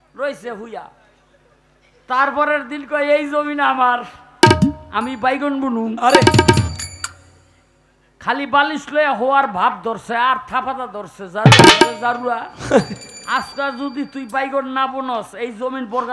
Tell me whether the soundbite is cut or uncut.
uncut